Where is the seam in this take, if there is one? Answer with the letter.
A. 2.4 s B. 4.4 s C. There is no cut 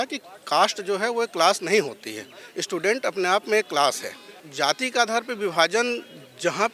B